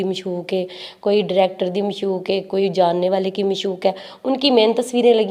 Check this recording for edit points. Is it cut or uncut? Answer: uncut